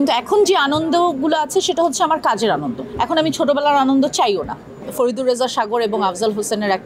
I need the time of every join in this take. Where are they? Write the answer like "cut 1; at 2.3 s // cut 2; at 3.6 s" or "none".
cut 1; at 4.7 s